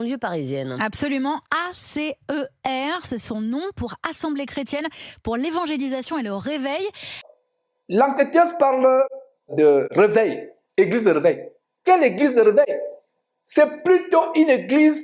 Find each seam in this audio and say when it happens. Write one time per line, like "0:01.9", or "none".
0:07.2